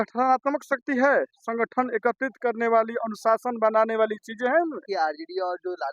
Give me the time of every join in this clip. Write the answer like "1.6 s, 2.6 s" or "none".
4.9 s